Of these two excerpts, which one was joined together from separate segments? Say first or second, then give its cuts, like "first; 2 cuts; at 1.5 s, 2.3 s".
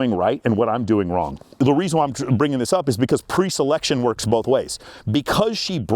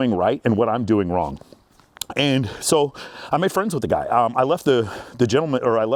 first; 1 cut; at 1.5 s